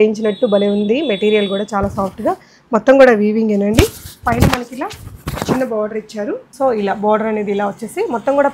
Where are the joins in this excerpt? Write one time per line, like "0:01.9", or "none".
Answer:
0:06.5